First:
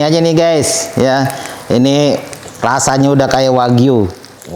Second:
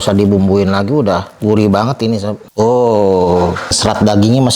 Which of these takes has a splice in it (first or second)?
second